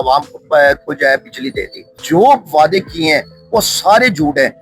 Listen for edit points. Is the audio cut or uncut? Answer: cut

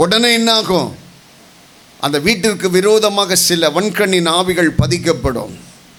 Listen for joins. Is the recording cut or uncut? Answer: uncut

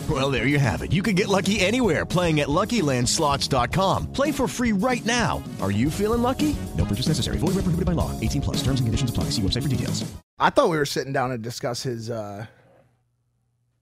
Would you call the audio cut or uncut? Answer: cut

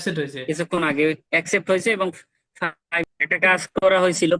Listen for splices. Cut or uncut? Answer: cut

